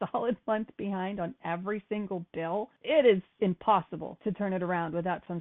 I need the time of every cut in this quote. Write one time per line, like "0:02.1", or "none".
0:02.8
0:04.0